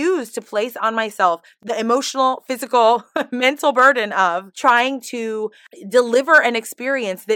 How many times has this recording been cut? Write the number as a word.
zero